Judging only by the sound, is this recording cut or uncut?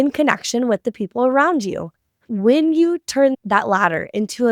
cut